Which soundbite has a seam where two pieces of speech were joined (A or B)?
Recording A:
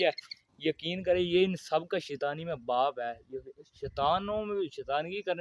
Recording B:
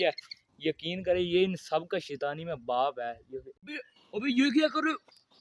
B